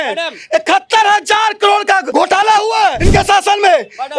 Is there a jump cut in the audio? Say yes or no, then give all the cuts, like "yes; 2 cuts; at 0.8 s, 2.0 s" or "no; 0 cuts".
yes; 2 cuts; at 2.1 s, 3.0 s